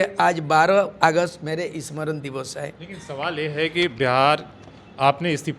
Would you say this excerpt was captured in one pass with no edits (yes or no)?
yes